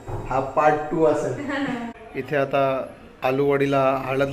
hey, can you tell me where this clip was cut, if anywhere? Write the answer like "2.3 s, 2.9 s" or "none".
2.0 s